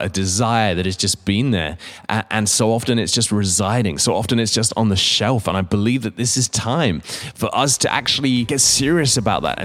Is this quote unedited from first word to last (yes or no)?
no